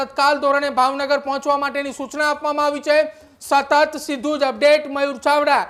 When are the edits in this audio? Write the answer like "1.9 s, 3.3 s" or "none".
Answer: none

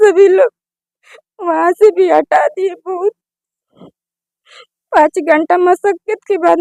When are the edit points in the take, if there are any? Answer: none

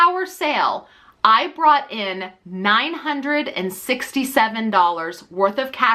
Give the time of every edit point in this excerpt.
none

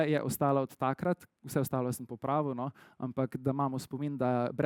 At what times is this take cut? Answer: none

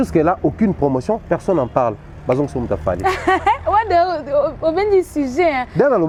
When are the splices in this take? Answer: none

